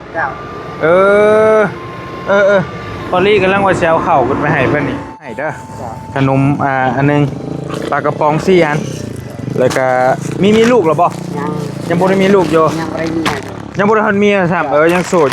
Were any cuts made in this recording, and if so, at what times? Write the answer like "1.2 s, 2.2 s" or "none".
5.2 s